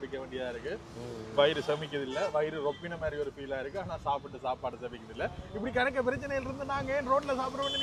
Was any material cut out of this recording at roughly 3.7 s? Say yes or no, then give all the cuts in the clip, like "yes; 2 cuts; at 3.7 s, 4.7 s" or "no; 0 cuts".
no; 0 cuts